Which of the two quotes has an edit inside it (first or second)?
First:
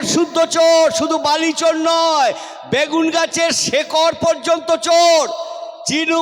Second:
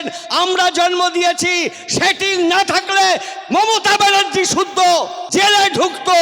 second